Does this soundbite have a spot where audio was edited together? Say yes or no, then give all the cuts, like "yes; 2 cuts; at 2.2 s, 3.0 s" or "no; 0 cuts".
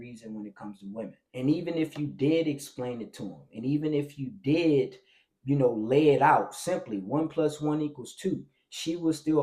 yes; 1 cut; at 1.2 s